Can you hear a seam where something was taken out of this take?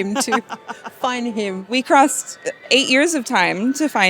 yes; 1 cut; at 1.7 s

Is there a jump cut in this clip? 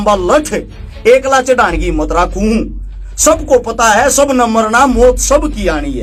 no; 0 cuts

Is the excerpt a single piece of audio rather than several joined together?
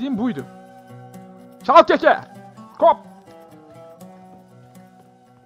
yes; 0 cuts

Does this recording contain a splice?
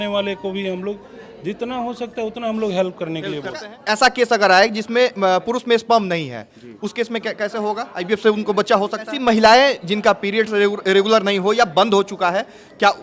yes; 2 cuts; at 3.6 s, 9.1 s

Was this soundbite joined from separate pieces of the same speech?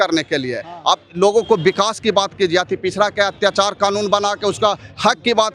no; 0 cuts

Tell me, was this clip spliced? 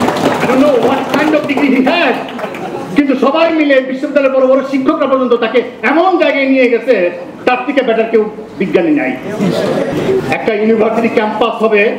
yes; 1 cut; at 9.9 s

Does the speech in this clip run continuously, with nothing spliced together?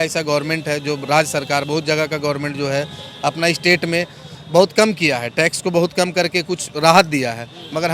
yes; 0 cuts

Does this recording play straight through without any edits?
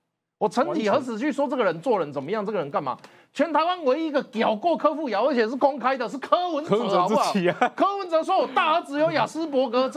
yes; 0 cuts

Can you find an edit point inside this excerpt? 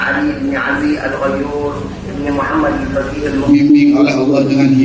yes; 1 cut; at 3.5 s

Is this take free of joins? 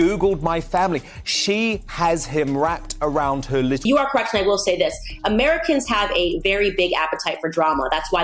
no; 1 cut; at 3.8 s

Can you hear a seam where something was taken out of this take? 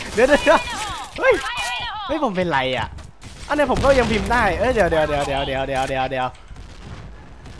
no; 0 cuts

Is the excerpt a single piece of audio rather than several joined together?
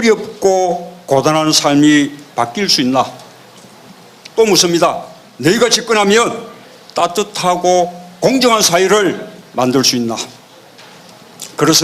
no; 1 cut; at 8.9 s

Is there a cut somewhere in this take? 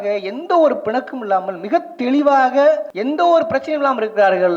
yes; 1 cut; at 2.9 s

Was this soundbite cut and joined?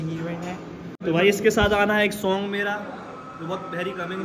yes; 1 cut; at 1.0 s

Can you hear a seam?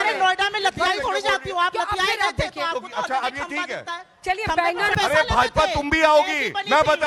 yes; 1 cut; at 4.9 s

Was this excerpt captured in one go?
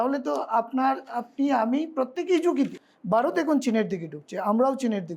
no; 1 cut; at 2.9 s

